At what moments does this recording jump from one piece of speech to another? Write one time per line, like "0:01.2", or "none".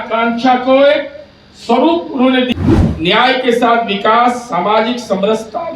0:02.5